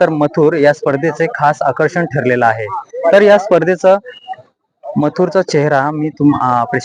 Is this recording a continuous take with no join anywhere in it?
yes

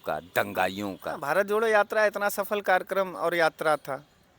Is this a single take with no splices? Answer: no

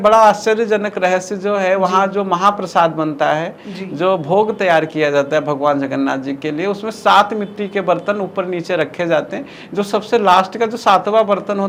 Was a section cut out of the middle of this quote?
no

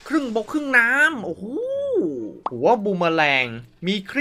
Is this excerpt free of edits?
no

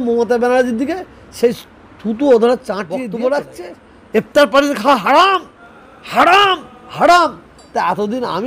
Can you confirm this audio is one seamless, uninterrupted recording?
no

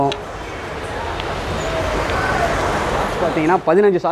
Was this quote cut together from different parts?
yes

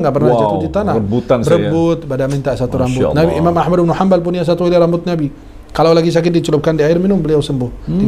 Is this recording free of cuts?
yes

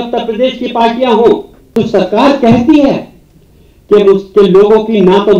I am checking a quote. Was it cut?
yes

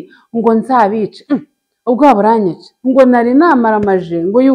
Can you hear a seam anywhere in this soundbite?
yes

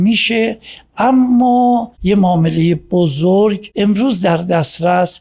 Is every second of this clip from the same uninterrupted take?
no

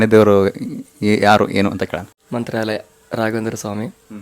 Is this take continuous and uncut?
no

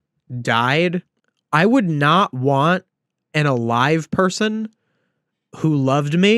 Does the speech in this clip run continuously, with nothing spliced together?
yes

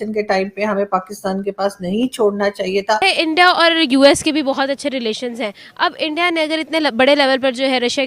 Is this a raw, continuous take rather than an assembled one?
no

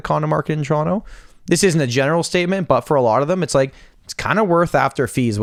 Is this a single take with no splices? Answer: yes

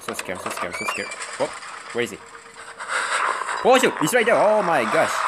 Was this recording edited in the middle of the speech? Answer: no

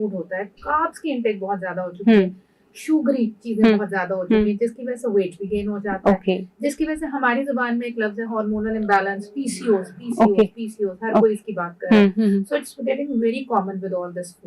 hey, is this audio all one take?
yes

